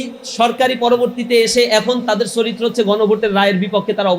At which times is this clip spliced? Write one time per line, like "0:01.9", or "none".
none

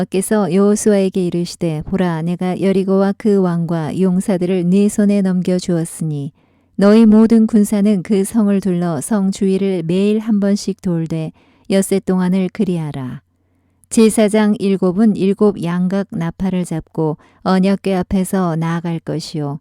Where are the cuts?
0:06.3

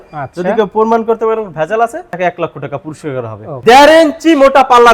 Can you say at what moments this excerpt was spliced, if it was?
0:03.6

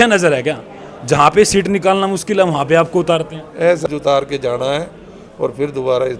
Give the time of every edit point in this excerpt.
0:03.9

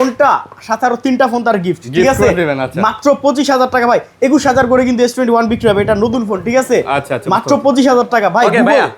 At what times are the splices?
none

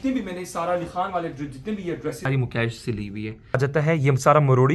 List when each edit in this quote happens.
0:02.3
0:03.6

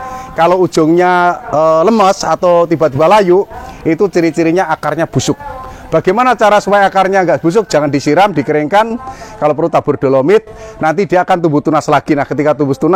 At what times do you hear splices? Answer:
none

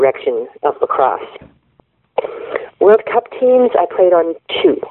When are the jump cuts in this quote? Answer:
0:01.5

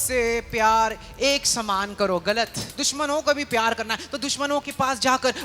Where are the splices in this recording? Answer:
0:02.8

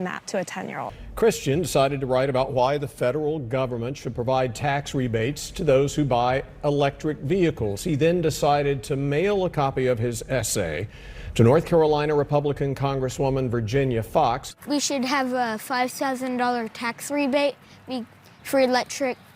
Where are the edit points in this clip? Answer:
0:01.0
0:14.5

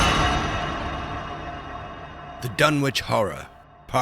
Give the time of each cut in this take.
0:02.3

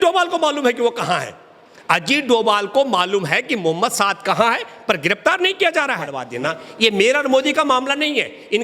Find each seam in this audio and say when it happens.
0:06.4

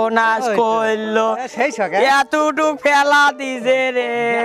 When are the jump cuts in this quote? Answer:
none

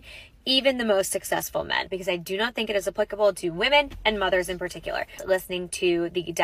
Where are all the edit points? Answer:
0:01.9
0:03.9
0:05.2

